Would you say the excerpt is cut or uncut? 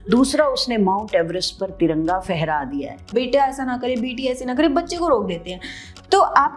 cut